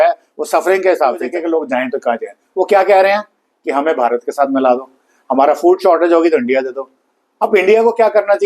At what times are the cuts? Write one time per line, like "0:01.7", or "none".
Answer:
0:01.4